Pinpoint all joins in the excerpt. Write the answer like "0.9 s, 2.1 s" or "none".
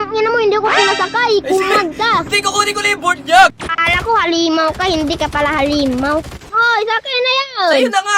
3.5 s, 6.4 s